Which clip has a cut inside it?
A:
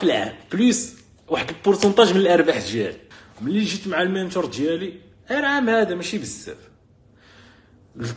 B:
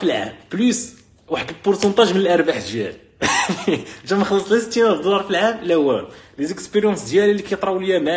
A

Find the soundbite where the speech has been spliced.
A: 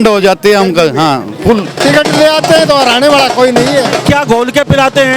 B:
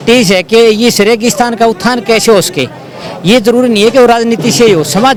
A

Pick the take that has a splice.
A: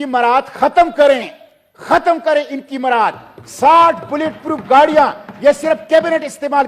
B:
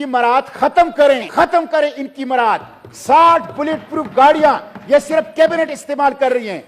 B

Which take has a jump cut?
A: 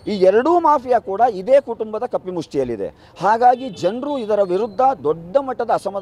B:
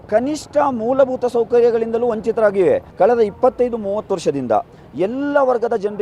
B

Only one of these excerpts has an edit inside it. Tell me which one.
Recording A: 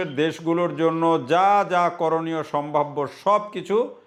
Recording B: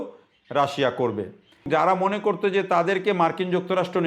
B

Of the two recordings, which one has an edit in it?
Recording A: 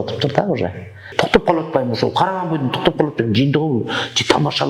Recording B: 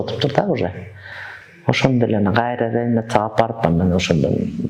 A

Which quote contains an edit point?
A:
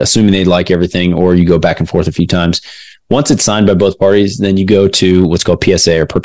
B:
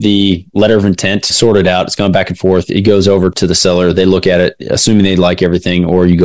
B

